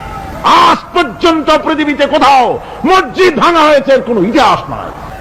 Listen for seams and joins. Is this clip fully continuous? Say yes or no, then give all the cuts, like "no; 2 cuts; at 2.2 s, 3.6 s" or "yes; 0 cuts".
yes; 0 cuts